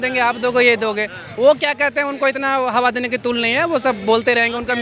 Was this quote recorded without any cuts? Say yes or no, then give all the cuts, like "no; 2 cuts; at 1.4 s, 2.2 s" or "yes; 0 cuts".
yes; 0 cuts